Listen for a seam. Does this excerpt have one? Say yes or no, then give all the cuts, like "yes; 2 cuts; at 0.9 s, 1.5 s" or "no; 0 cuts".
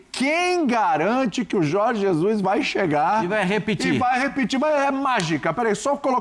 no; 0 cuts